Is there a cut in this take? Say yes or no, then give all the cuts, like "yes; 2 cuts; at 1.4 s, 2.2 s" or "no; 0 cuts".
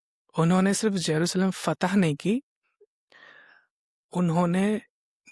no; 0 cuts